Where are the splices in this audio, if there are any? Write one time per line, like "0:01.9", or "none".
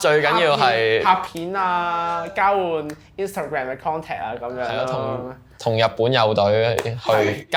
none